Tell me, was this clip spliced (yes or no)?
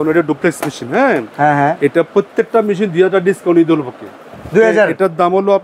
no